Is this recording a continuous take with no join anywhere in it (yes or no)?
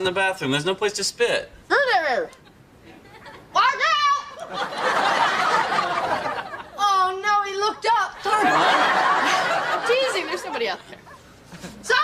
yes